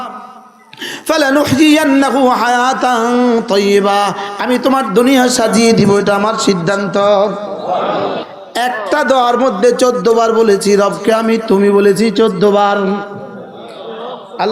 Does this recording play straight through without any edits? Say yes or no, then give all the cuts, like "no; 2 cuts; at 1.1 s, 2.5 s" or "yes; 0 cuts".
no; 1 cut; at 8.2 s